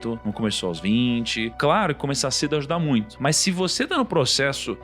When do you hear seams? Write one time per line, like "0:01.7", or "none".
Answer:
0:01.5
0:03.1